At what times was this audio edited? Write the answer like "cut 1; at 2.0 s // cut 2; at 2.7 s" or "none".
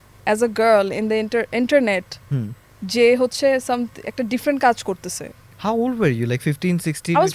none